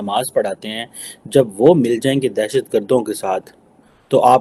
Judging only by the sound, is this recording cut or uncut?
uncut